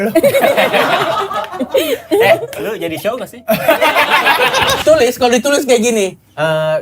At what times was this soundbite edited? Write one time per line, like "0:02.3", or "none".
0:04.8